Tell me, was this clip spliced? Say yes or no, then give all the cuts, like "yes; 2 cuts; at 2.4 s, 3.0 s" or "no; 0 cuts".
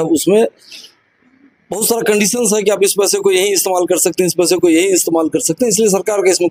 no; 0 cuts